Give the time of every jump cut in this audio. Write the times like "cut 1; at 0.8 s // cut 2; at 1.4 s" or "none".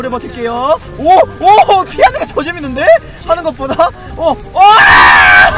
none